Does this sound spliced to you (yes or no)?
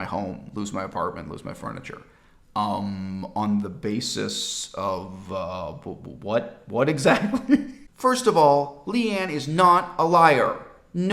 yes